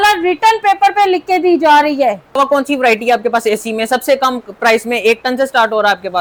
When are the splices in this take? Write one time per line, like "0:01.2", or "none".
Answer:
none